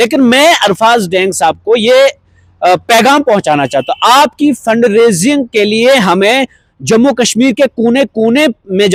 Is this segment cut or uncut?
uncut